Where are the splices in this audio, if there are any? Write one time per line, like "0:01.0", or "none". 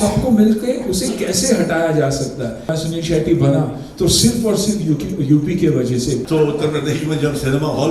0:02.7
0:06.2

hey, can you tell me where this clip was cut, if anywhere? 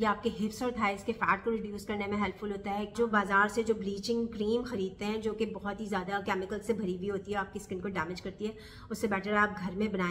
0:02.9

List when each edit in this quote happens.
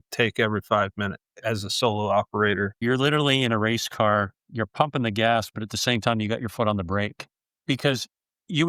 0:01.2
0:02.8

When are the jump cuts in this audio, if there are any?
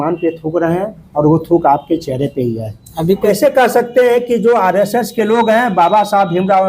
0:03.2

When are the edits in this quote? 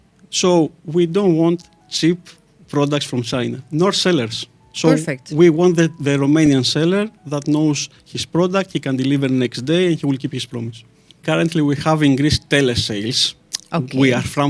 0:11.2

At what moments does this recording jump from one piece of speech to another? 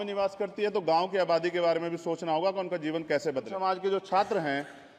0:03.5

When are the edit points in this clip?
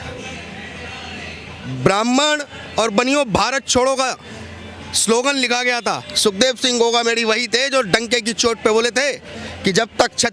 none

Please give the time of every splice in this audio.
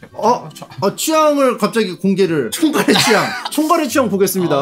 0:02.5
0:03.5

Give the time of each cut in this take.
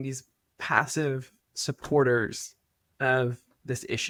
none

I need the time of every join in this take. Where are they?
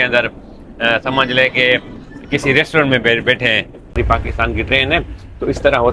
0:04.0

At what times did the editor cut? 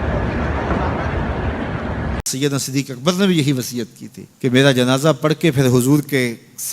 0:02.3

